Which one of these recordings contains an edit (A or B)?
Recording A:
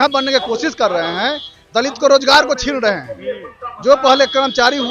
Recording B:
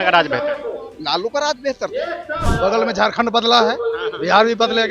B